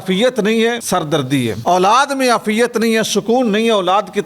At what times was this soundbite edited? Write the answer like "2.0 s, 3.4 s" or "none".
1.3 s